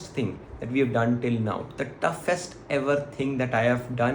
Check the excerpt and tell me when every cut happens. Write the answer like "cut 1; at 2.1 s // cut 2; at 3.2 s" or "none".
none